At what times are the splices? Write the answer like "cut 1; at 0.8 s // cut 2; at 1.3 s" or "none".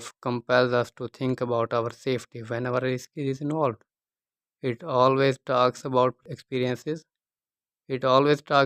cut 1; at 6.2 s